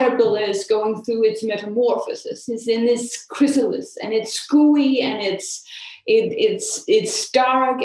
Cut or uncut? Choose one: uncut